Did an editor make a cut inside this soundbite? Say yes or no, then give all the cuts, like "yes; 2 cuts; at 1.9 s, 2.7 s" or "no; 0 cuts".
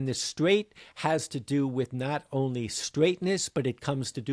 no; 0 cuts